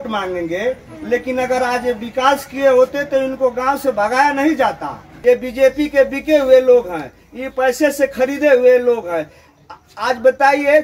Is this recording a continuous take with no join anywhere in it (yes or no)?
no